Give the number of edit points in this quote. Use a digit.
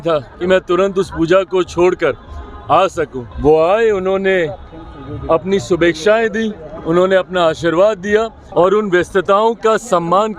2